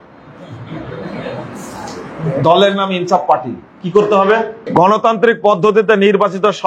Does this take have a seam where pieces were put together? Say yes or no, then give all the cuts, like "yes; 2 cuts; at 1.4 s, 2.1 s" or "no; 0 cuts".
yes; 1 cut; at 4.6 s